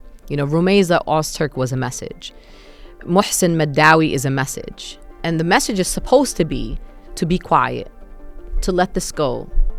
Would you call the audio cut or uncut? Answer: uncut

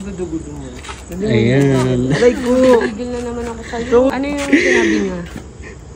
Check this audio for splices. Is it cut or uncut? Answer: cut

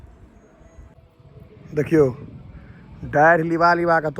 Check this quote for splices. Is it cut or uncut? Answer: cut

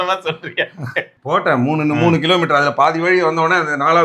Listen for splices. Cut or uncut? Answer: cut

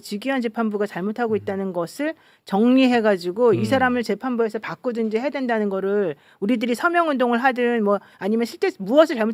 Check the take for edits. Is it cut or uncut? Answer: uncut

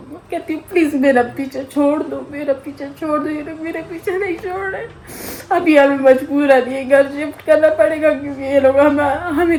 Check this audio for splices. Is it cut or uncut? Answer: uncut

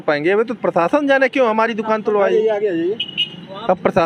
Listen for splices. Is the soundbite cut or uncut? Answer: uncut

